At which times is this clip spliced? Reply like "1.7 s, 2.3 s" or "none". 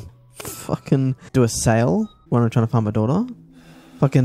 1.2 s, 2.2 s